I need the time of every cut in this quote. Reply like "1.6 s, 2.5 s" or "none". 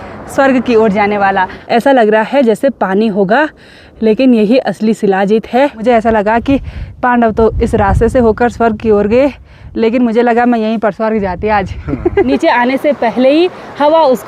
1.6 s, 5.8 s, 12.3 s